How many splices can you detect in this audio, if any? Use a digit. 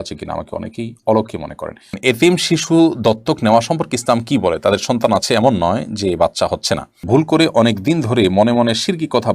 2